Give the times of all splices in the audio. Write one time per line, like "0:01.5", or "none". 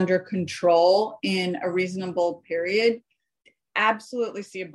none